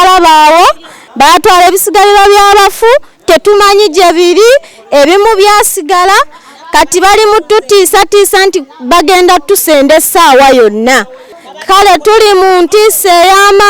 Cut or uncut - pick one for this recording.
cut